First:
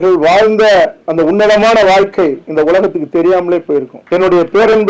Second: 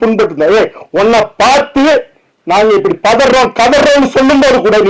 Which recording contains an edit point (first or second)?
first